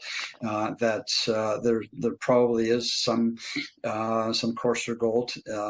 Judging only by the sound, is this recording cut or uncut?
uncut